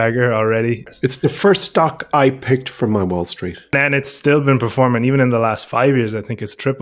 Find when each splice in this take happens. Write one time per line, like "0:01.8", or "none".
0:00.9
0:03.7